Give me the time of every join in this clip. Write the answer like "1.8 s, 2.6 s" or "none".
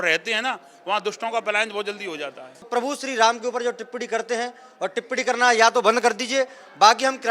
2.7 s